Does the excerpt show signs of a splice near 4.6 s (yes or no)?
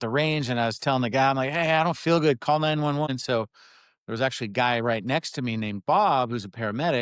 no